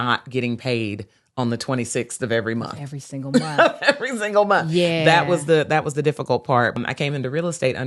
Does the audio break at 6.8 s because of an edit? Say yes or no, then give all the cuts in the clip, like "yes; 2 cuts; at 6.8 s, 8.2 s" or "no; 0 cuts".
yes; 1 cut; at 6.8 s